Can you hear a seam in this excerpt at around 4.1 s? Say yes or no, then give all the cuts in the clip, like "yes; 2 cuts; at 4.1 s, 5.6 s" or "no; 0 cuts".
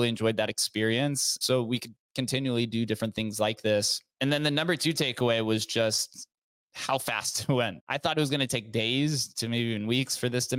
yes; 3 cuts; at 1.4 s, 4.1 s, 7.8 s